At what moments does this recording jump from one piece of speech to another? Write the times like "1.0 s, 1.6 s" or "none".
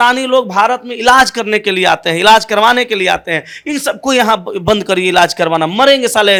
none